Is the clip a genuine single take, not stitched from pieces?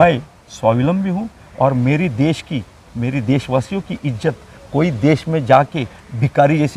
yes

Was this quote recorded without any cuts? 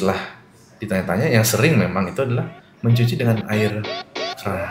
yes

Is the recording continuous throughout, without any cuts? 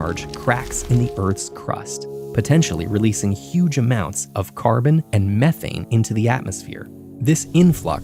yes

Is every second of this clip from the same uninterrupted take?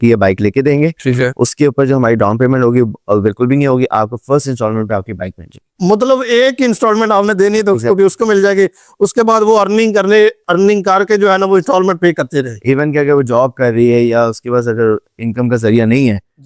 yes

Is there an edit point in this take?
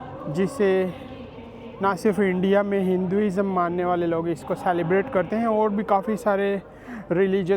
no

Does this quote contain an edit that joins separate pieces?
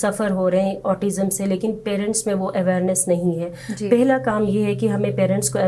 no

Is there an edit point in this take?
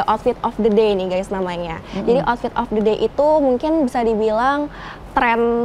no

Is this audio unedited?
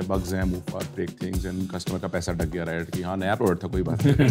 yes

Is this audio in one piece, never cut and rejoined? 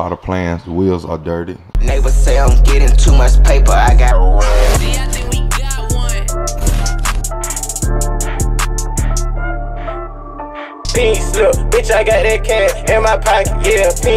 no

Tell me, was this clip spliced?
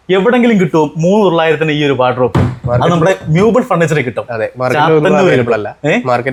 no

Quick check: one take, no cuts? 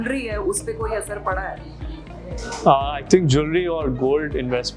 yes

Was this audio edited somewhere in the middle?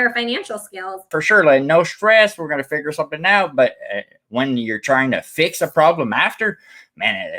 yes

